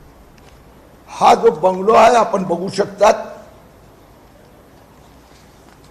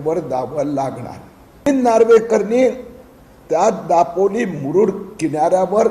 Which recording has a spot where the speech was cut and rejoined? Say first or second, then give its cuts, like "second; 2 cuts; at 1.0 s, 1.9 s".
second; 1 cut; at 1.7 s